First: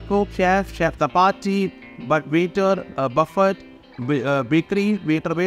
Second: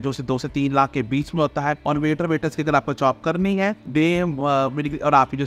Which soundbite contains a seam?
second; 2 cuts; at 1.8 s, 3.8 s

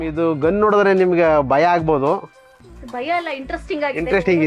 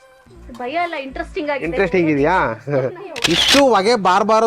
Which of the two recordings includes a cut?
second; 1 cut; at 3.1 s

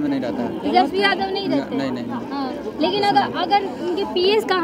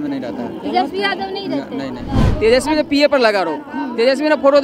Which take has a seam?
second; 1 cut; at 2.1 s

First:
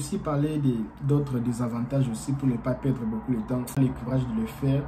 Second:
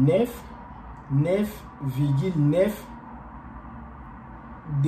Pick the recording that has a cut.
first; 1 cut; at 3.7 s

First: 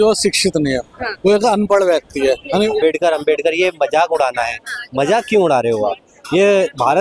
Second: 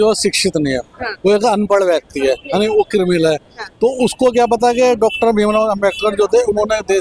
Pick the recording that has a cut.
first; 1 cut; at 2.8 s

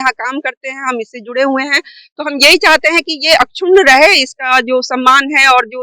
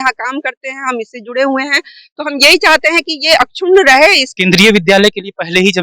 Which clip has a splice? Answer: second; 1 cut; at 4.3 s

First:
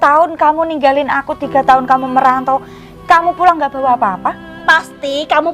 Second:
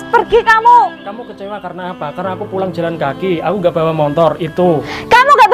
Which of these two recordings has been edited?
first; 1 cut; at 4.5 s

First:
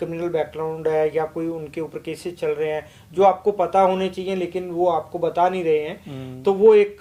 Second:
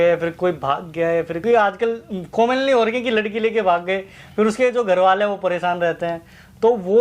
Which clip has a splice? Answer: second; 1 cut; at 1.4 s

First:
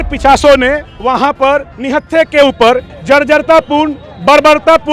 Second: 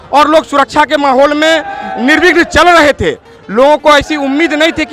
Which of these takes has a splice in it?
first; 3 cuts; at 0.9 s, 1.7 s, 2.9 s

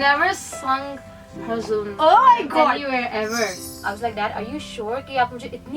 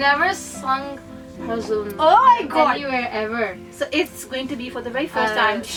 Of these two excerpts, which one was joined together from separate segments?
first; 1 cut; at 3.6 s

